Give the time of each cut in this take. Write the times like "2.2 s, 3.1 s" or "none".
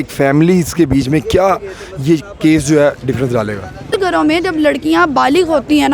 3.9 s

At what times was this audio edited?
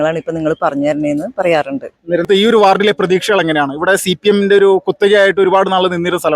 2.3 s

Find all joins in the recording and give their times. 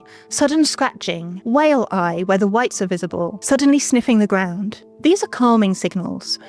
none

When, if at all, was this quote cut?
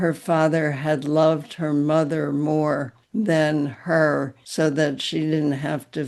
3.0 s, 4.4 s

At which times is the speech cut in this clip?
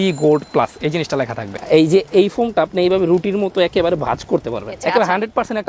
1.5 s, 4.7 s

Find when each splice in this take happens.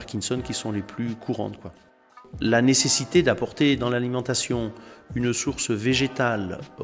2.2 s

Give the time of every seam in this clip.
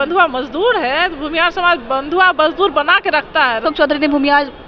3.6 s

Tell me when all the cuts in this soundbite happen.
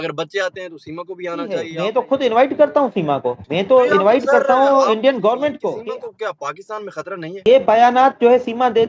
1.7 s, 5.7 s, 7.4 s

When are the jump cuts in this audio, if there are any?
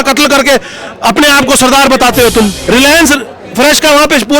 2.6 s

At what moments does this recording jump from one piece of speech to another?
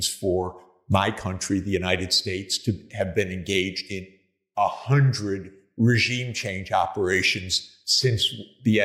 none

